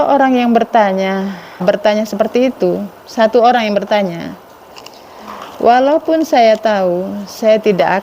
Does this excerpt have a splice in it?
yes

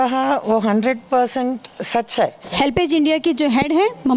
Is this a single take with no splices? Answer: no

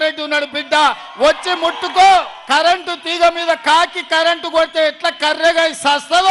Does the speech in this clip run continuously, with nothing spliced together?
no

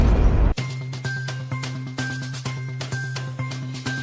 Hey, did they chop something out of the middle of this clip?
no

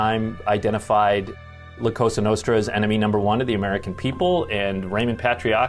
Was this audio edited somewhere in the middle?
no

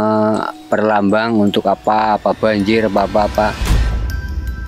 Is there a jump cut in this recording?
yes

